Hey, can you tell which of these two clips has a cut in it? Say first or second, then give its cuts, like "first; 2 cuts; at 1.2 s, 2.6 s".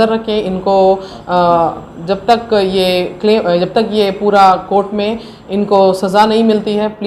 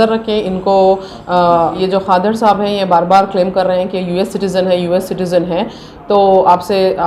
second; 1 cut; at 1.8 s